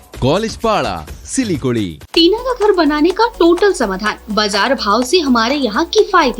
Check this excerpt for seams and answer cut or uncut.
cut